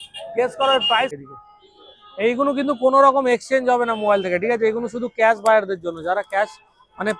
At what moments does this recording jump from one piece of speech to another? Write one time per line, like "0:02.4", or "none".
0:01.1

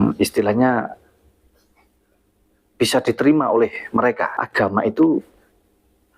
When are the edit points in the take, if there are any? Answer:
0:04.3

